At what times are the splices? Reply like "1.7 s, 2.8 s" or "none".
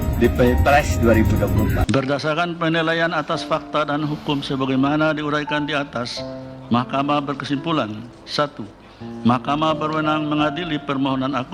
1.8 s